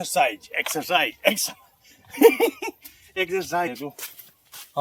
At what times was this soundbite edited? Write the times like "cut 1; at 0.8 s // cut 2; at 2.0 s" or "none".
cut 1; at 3.7 s